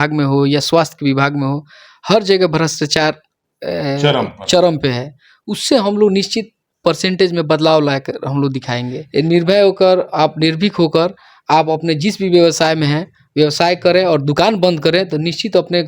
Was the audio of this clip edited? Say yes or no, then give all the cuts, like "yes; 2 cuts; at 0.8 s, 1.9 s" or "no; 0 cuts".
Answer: yes; 1 cut; at 8.9 s